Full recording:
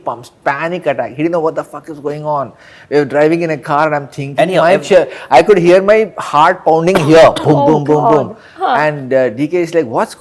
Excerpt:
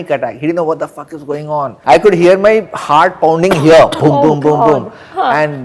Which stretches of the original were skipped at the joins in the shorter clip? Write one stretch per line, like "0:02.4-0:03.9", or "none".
0:02.5-0:05.2

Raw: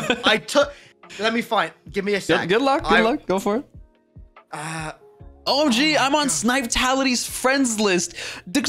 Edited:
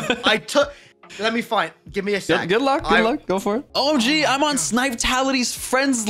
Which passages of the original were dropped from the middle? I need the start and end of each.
0:03.7-0:05.4

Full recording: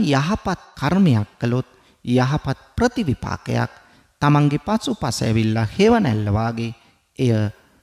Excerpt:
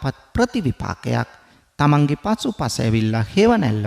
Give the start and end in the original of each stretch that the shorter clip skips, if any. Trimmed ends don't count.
none

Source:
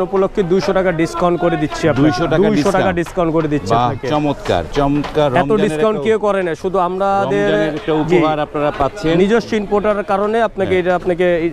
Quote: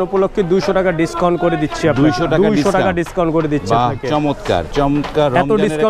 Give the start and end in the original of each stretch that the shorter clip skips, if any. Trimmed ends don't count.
none

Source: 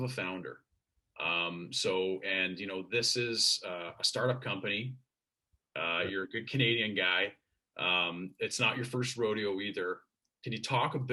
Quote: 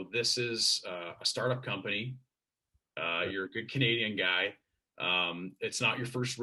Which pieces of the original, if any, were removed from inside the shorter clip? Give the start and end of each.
none

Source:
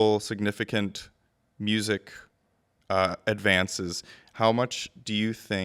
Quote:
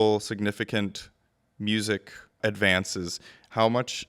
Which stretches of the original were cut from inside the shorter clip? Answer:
0:02.3-0:03.2

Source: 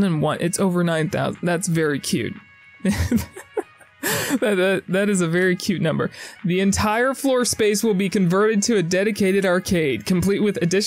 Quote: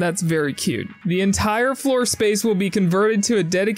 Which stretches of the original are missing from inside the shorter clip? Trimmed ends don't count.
0:02.4-0:06.3

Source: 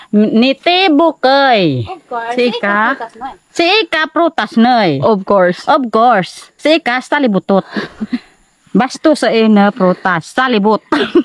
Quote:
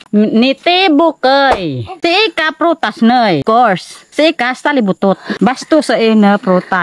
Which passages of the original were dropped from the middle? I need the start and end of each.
0:01.5-0:03.1
0:05.0-0:05.9
0:07.7-0:08.6

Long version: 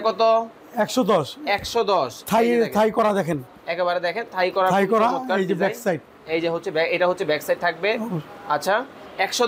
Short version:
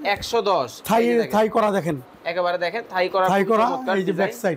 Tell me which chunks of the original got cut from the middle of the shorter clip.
none

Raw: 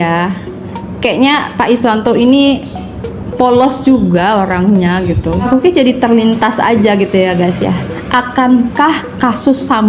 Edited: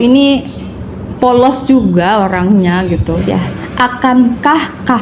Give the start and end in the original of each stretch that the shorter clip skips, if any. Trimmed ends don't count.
0:05.4-0:07.5

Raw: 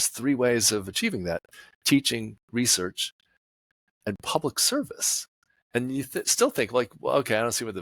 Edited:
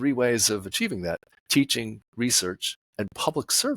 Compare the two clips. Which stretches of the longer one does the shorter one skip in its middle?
0:01.5-0:01.7
0:03.1-0:03.8

